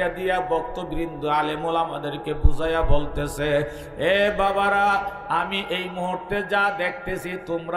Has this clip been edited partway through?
no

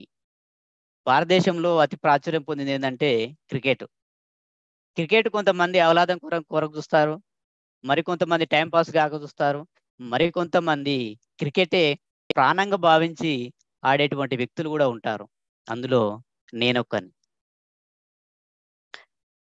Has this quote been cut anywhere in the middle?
no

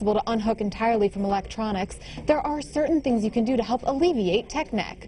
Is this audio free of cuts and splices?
yes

